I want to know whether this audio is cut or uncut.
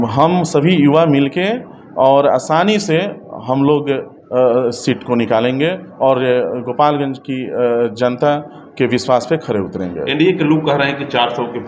uncut